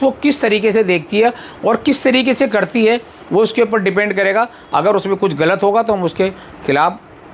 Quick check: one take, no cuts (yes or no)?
yes